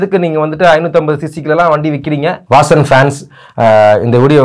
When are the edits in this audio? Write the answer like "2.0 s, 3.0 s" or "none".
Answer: 2.4 s